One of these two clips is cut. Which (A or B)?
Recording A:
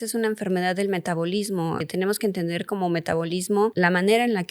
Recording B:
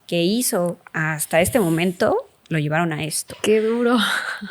A